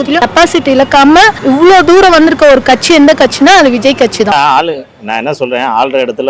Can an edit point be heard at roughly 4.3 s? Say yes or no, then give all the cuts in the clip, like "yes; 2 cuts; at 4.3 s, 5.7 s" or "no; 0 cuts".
yes; 1 cut; at 4.3 s